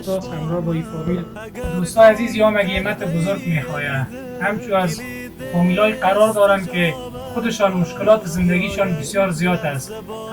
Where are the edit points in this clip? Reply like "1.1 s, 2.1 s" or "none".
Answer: 1.4 s

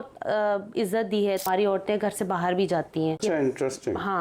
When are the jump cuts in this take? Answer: 1.4 s, 3.2 s

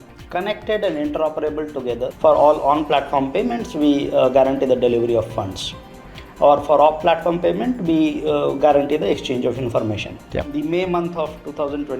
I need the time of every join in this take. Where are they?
2.1 s, 10.5 s

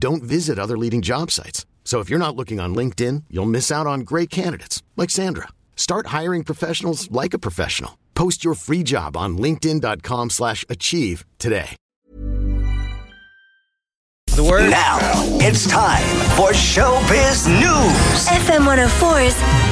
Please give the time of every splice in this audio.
11.9 s, 14.5 s

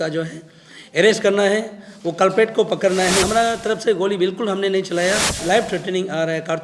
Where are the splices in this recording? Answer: 3.2 s, 5.4 s

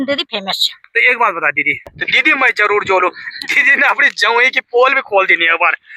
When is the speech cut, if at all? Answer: 1.9 s

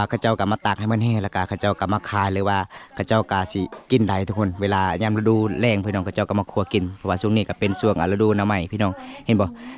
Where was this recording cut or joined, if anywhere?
none

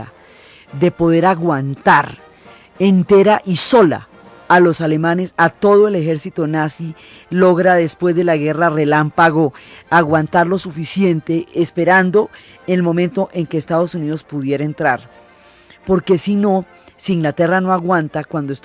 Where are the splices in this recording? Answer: none

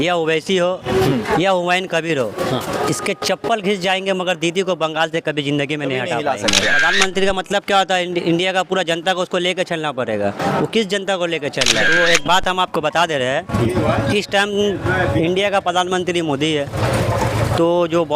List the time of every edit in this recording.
6.8 s, 11.9 s

